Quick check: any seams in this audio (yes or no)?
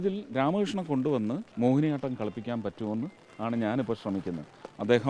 yes